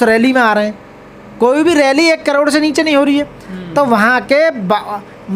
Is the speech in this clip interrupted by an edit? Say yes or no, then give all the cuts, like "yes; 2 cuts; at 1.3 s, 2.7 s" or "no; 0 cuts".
no; 0 cuts